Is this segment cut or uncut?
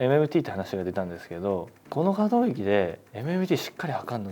cut